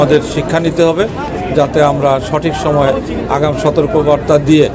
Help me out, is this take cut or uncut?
cut